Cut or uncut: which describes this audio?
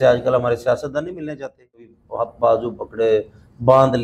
cut